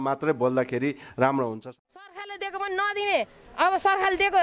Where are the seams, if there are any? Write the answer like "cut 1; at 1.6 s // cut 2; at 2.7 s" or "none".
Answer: cut 1; at 1.7 s

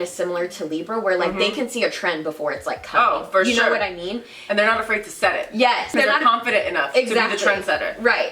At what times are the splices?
cut 1; at 6.0 s

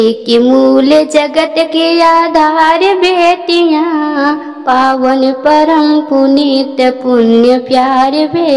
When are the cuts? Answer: none

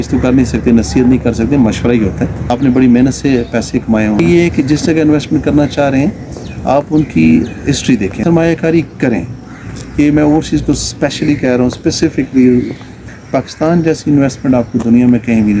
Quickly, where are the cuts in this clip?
cut 1; at 2.5 s // cut 2; at 4.2 s // cut 3; at 8.2 s // cut 4; at 12.9 s

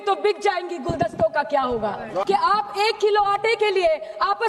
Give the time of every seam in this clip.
cut 1; at 2.2 s

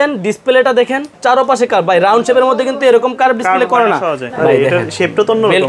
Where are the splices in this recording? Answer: cut 1; at 1.2 s // cut 2; at 4.3 s

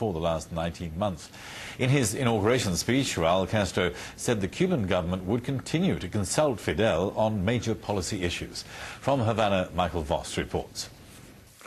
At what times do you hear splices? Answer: cut 1; at 1.6 s

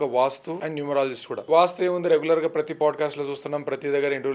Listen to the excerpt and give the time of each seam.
cut 1; at 0.9 s

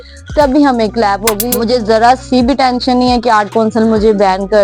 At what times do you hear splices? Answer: cut 1; at 1.4 s

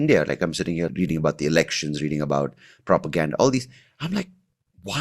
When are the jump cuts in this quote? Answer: cut 1; at 0.9 s

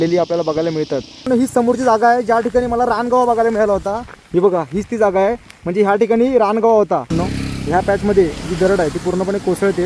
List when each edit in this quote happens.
cut 1; at 1.3 s // cut 2; at 7.2 s

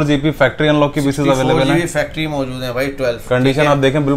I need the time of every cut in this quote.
none

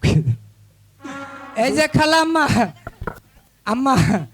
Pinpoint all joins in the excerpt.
cut 1; at 1.4 s

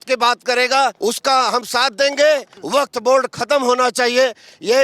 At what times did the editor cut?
cut 1; at 1.0 s // cut 2; at 2.5 s

